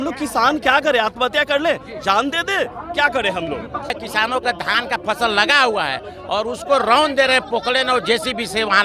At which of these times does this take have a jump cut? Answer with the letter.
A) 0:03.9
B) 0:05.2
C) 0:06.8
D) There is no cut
A